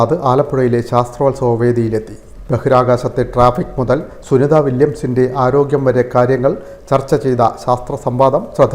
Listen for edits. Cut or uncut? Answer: uncut